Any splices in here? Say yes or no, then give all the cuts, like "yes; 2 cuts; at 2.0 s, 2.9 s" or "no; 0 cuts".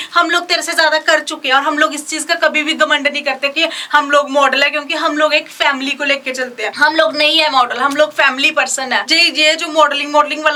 no; 0 cuts